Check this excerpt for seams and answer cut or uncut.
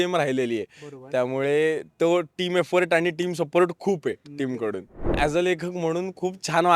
cut